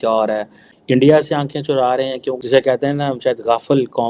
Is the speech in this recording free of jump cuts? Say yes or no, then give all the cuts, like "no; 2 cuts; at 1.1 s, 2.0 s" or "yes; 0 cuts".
no; 1 cut; at 2.4 s